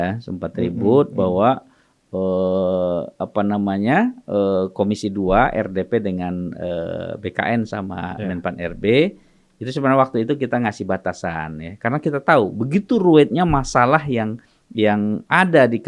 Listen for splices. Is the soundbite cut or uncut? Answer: uncut